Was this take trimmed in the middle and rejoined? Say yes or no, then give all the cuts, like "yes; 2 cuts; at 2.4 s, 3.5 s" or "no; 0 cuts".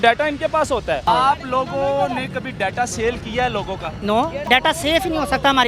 yes; 2 cuts; at 1.0 s, 4.4 s